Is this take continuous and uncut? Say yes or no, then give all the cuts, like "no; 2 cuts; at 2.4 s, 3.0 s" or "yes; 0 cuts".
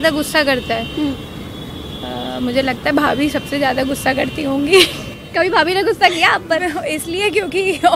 yes; 0 cuts